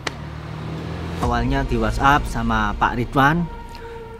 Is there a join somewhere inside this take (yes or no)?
yes